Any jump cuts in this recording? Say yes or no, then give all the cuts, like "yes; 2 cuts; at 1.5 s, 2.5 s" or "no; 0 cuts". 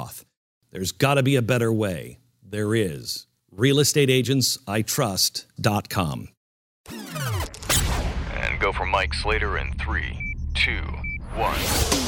yes; 1 cut; at 6.7 s